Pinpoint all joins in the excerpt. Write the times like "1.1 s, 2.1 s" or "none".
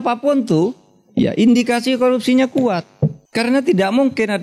3.2 s